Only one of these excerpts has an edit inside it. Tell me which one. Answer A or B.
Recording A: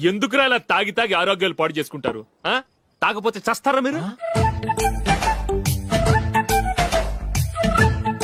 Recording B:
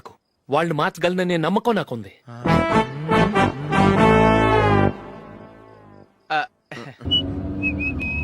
B